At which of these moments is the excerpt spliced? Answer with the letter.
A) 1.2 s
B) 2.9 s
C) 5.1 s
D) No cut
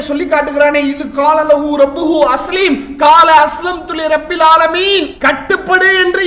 C